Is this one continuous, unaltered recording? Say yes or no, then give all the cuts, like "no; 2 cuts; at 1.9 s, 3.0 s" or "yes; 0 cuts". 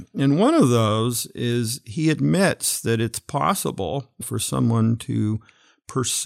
no; 1 cut; at 4.2 s